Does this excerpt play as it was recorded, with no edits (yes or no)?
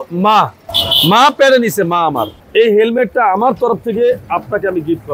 no